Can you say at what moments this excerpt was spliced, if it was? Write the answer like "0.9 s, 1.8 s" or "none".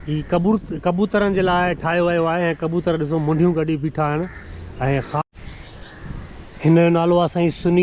5.2 s